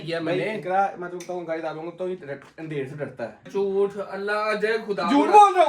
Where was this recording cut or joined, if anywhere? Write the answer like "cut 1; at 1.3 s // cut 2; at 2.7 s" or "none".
cut 1; at 3.4 s